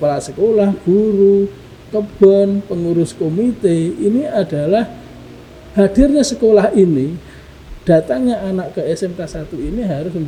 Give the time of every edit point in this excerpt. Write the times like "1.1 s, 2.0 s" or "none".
none